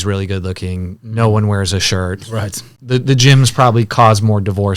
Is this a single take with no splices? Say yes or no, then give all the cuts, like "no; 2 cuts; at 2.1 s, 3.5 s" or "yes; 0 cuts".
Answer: no; 1 cut; at 2.7 s